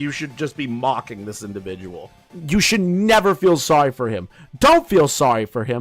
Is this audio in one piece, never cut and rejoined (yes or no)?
no